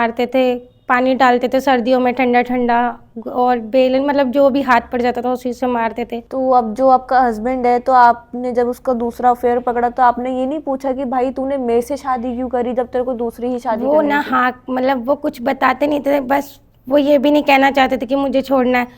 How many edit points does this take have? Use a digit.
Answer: 1